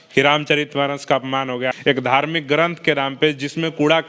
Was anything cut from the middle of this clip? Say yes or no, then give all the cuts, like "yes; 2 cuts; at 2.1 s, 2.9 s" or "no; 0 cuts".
yes; 1 cut; at 1.8 s